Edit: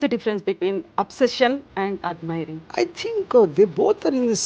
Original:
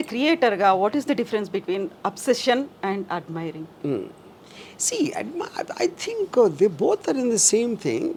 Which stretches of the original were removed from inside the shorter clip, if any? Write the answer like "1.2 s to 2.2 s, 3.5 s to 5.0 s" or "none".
3.7 s to 5.7 s

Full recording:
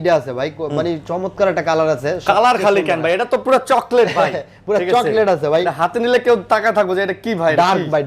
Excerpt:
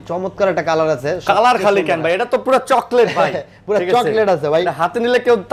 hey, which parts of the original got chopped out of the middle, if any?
none

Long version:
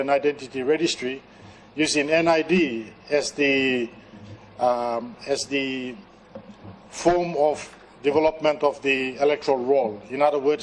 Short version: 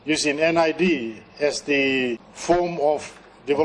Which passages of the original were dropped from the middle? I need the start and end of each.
4.0 s to 6.9 s

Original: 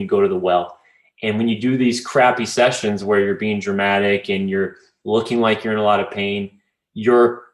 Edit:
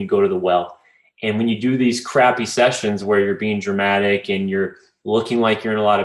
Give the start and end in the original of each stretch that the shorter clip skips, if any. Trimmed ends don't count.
none

